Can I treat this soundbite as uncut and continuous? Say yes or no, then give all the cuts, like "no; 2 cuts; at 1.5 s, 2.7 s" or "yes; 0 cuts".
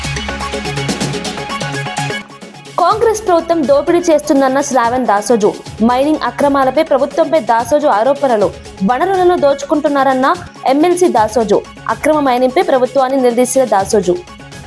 no; 1 cut; at 2.2 s